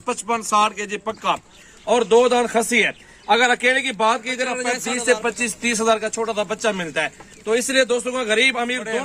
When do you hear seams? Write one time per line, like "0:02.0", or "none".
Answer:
0:04.8